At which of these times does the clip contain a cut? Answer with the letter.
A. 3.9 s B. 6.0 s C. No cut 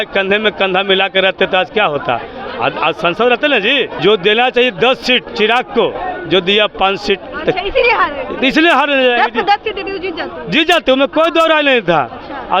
A